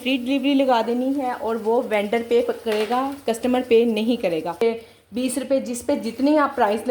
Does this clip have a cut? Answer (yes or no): yes